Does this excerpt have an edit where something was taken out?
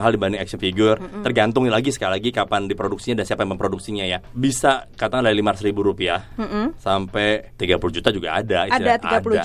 yes; 2 cuts; at 4.2 s, 7.5 s

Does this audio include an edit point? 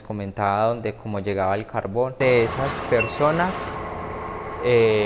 yes; 1 cut; at 2.2 s

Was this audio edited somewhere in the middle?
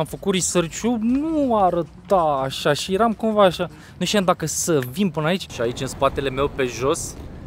yes; 1 cut; at 5.5 s

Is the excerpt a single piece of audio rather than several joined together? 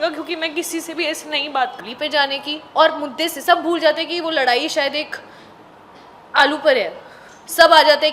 no; 1 cut; at 1.8 s

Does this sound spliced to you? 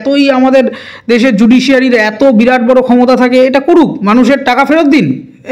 no; 0 cuts

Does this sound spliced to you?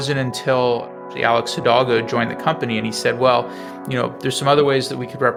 no; 0 cuts

